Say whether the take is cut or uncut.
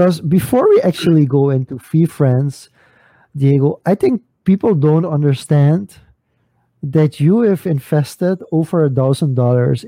uncut